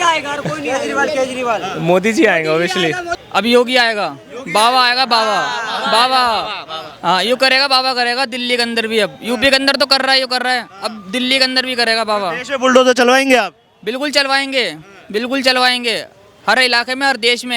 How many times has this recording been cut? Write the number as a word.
one